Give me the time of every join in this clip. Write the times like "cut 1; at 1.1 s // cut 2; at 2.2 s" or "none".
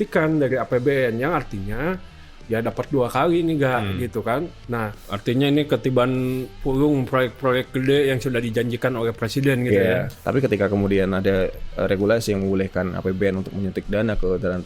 cut 1; at 5.0 s // cut 2; at 10.1 s